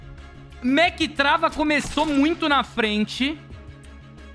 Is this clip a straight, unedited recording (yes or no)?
yes